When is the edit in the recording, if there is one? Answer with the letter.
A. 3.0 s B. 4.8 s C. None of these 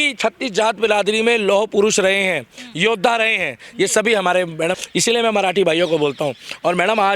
B